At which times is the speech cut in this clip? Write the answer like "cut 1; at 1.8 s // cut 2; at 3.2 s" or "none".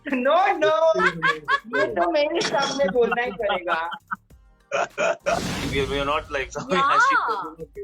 cut 1; at 5.6 s